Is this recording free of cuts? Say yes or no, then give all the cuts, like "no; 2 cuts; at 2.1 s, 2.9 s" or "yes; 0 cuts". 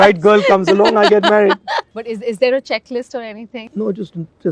no; 2 cuts; at 1.8 s, 3.6 s